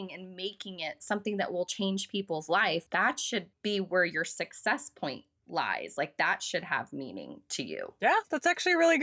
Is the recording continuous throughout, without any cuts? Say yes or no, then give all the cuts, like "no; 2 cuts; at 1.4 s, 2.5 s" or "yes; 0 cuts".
no; 2 cuts; at 2.9 s, 7.9 s